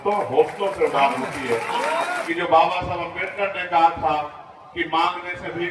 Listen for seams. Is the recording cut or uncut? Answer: cut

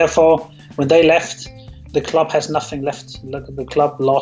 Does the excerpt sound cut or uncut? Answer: uncut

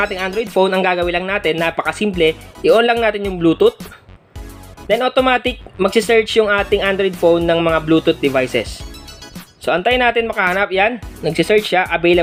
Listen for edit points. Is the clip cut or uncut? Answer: uncut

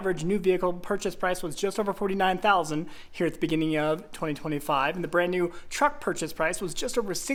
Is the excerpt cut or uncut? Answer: uncut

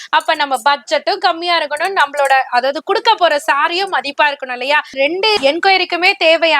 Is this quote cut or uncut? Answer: cut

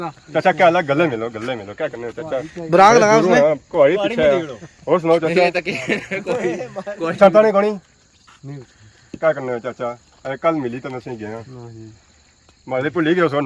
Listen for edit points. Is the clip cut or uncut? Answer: uncut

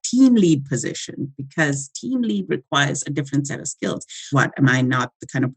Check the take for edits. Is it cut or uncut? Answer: cut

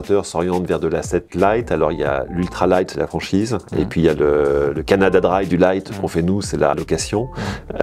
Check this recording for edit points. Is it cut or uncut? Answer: cut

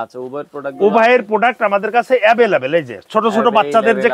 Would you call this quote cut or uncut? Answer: uncut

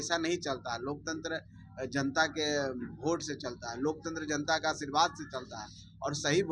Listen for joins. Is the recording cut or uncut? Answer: uncut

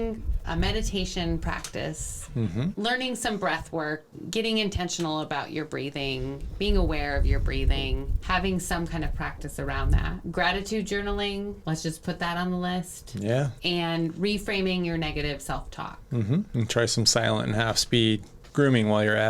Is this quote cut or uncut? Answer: cut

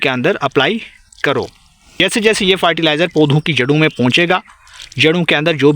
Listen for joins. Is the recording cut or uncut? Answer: cut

